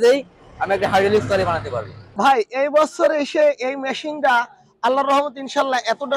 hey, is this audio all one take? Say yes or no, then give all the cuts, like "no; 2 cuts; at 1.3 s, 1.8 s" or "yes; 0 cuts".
no; 1 cut; at 2.0 s